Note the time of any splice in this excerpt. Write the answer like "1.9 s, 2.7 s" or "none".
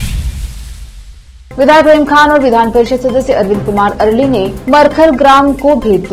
1.0 s